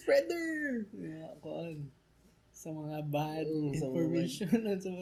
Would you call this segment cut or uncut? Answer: uncut